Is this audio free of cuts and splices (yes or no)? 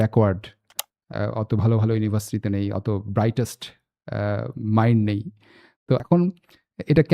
no